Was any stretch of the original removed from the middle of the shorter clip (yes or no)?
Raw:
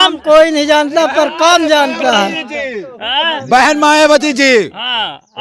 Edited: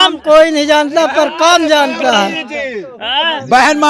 no